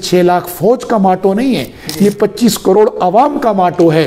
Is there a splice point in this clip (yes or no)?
no